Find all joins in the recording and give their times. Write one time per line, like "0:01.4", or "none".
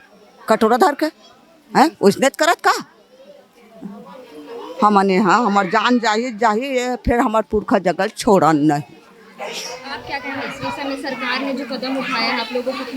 none